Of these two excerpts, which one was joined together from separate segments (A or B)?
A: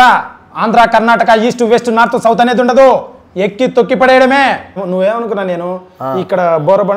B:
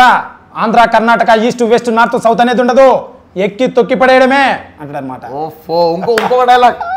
A